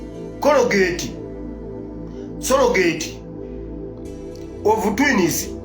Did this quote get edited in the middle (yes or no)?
yes